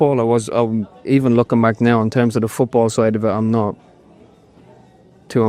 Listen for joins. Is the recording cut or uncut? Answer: uncut